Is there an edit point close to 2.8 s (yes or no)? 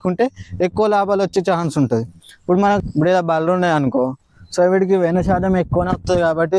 yes